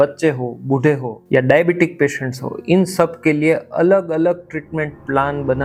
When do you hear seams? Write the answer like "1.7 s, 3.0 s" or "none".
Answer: none